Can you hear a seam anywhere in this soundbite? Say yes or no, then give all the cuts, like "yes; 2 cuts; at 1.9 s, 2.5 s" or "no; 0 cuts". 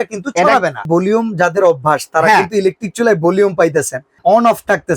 yes; 2 cuts; at 0.8 s, 4.0 s